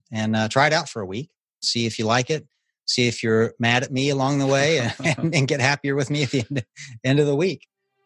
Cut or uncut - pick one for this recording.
cut